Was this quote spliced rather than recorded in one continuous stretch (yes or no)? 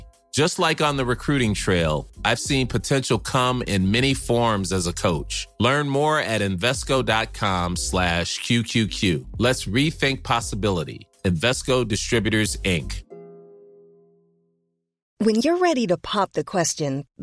yes